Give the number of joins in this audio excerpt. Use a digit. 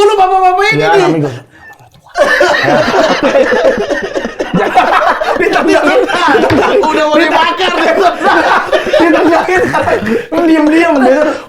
0